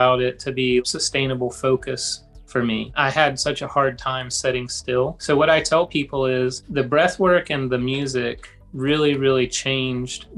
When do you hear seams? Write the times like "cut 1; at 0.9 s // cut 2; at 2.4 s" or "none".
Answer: cut 1; at 0.8 s // cut 2; at 2.9 s // cut 3; at 5.2 s // cut 4; at 6.6 s